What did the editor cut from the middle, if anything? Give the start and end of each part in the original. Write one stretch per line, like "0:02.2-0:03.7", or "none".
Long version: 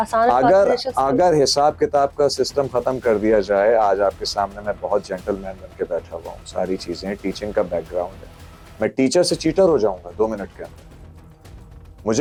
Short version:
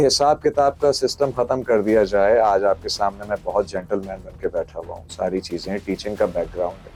none